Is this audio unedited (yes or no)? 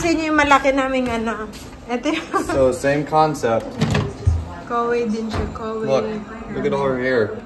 yes